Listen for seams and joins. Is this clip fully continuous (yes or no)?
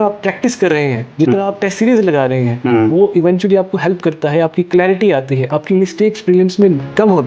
yes